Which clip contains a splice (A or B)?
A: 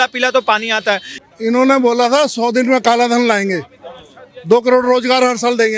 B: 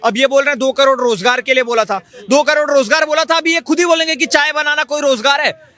A